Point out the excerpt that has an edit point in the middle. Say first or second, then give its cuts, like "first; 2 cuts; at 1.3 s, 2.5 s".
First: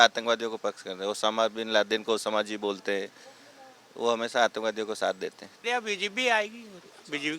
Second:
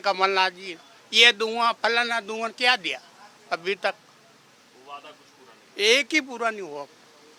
first; 1 cut; at 5.5 s